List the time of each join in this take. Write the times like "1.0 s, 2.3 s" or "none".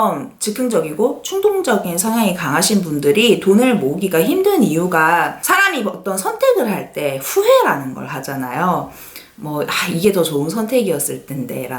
none